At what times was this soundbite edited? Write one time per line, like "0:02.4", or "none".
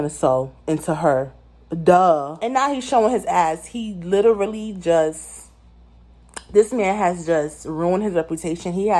0:02.3